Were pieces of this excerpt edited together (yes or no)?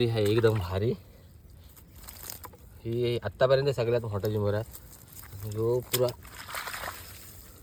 no